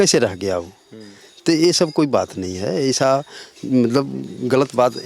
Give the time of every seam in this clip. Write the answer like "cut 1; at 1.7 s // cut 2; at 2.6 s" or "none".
none